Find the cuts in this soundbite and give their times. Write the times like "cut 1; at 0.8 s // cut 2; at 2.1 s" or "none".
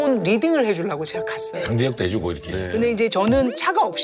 cut 1; at 2.5 s